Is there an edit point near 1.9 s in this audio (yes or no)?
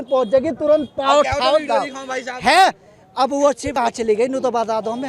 no